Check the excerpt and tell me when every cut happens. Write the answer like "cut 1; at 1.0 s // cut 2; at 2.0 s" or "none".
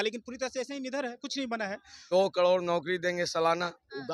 cut 1; at 2.0 s